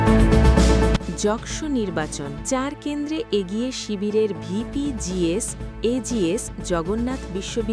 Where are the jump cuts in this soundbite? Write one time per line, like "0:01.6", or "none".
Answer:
0:02.4